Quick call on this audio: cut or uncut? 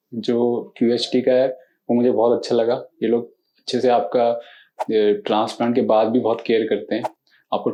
uncut